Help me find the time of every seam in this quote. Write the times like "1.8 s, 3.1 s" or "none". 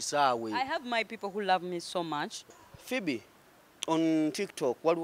2.4 s